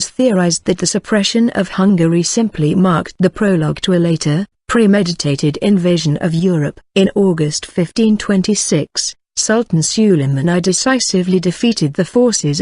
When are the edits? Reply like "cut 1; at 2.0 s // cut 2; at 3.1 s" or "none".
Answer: cut 1; at 2.7 s